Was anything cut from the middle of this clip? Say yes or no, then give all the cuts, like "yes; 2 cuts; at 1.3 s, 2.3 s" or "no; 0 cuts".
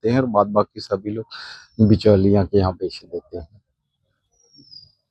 no; 0 cuts